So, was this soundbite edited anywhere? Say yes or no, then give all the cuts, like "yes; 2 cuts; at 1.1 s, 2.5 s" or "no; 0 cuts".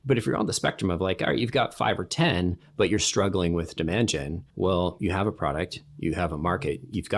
yes; 1 cut; at 4.4 s